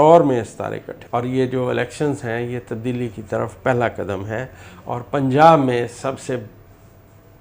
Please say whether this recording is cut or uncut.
cut